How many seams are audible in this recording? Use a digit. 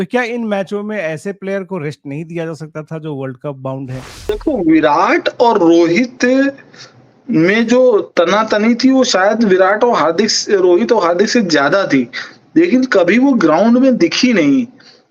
1